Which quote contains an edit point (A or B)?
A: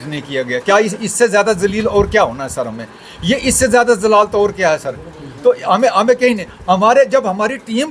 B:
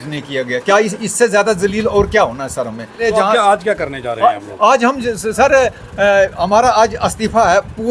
B